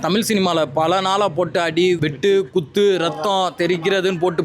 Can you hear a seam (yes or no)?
yes